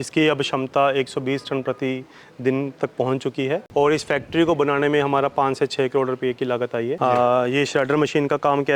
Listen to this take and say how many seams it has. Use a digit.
2